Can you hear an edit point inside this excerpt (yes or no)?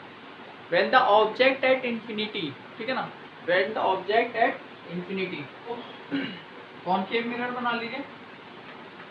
yes